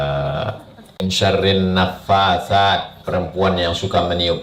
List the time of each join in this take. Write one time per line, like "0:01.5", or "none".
0:01.0